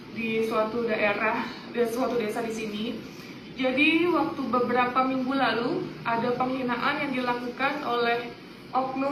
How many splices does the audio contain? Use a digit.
0